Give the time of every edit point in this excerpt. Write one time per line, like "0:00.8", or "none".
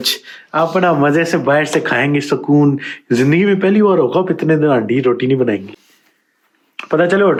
none